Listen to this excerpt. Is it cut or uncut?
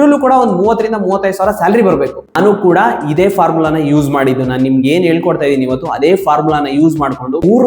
cut